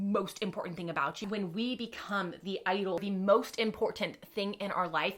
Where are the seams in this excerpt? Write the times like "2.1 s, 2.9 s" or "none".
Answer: 1.2 s, 3.0 s

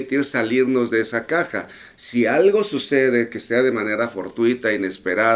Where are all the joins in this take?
none

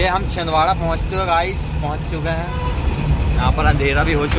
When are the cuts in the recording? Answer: none

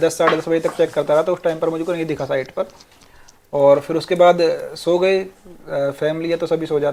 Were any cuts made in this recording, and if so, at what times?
none

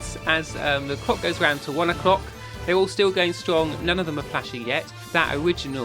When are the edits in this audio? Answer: 5.0 s

